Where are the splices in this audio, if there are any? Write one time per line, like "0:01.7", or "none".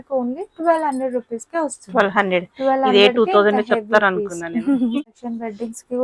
0:05.0